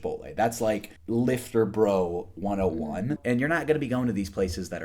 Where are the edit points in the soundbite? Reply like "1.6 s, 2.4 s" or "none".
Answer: 0.9 s, 3.2 s